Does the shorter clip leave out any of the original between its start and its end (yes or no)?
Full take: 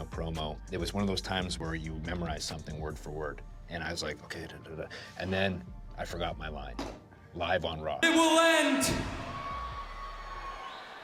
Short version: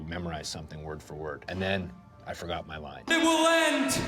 yes